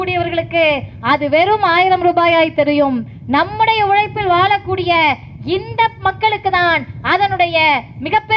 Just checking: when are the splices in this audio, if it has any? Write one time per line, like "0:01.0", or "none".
none